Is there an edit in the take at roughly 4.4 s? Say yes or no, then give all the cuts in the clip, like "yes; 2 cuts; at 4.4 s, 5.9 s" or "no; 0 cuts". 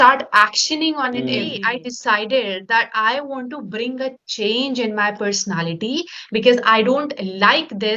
no; 1 cut; at 1.5 s